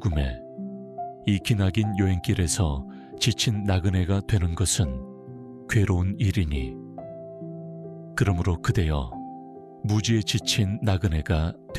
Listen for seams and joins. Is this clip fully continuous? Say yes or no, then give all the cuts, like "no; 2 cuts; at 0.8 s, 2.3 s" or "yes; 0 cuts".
yes; 0 cuts